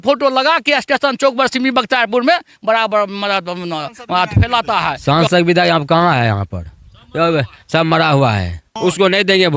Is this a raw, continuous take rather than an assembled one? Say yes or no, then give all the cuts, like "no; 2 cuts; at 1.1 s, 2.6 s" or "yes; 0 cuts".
no; 2 cuts; at 5.0 s, 8.7 s